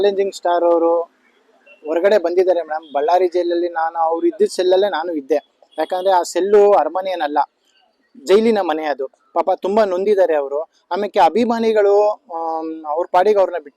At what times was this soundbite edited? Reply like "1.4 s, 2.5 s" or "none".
none